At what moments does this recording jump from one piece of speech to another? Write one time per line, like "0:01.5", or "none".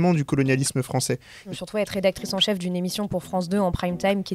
0:01.5